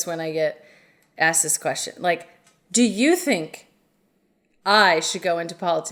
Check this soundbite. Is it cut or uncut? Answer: uncut